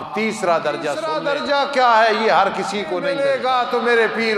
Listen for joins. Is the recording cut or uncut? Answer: cut